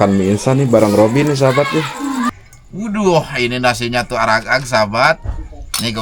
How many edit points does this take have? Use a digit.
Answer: 1